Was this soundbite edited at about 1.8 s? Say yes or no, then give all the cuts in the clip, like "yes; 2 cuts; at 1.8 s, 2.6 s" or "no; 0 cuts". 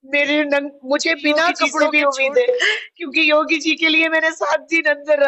yes; 1 cut; at 1.8 s